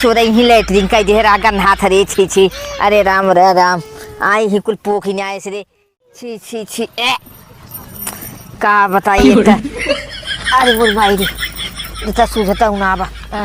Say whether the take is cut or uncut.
uncut